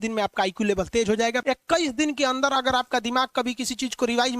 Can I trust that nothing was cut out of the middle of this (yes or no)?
no